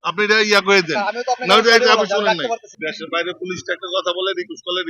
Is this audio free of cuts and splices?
no; 1 cut; at 2.7 s

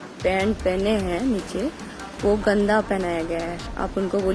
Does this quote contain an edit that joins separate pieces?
no; 0 cuts

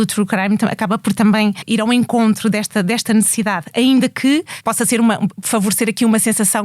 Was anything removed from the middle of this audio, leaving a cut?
yes; 3 cuts; at 1.6 s, 4.5 s, 5.4 s

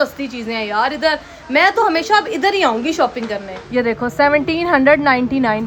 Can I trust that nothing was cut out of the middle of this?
yes; 0 cuts

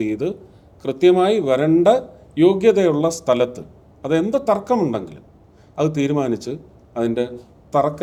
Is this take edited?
no; 0 cuts

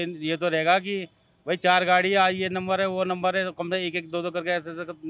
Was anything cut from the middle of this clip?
no; 0 cuts

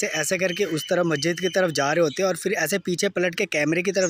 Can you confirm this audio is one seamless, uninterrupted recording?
yes; 0 cuts

